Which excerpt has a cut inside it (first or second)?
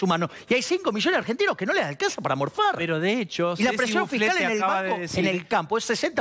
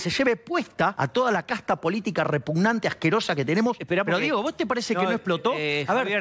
second